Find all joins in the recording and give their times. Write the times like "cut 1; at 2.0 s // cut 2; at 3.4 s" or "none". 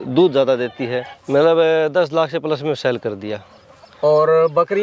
cut 1; at 1.1 s